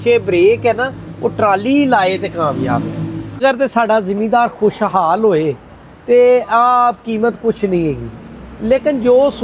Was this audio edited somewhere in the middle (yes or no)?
yes